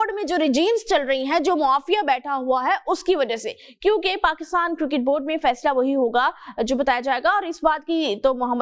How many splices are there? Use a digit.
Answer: 0